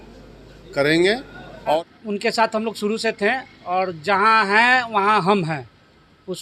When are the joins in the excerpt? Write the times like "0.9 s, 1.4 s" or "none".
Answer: 1.9 s